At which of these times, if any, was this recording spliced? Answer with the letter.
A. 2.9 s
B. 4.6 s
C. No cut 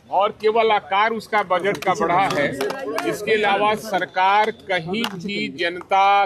C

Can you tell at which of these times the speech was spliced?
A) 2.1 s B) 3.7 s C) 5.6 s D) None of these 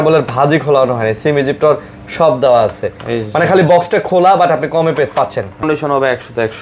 C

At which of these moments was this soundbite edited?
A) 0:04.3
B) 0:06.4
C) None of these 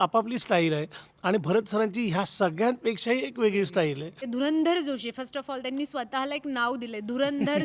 A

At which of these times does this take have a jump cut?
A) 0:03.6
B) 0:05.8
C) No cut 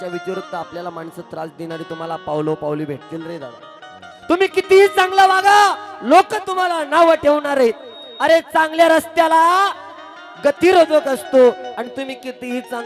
C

